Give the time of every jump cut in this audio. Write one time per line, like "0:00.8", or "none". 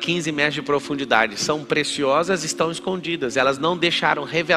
none